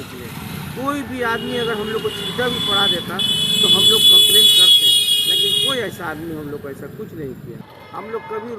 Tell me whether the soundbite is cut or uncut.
cut